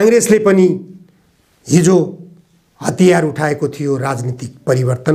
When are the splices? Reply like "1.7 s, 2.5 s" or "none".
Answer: none